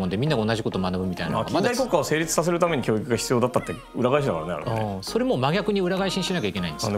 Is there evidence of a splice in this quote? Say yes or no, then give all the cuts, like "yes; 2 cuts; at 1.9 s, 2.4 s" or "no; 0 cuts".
no; 0 cuts